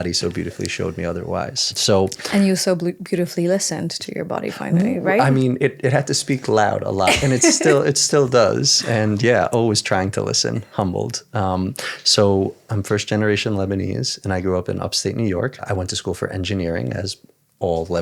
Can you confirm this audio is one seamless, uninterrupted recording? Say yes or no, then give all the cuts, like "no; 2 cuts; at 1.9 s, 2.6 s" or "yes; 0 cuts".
yes; 0 cuts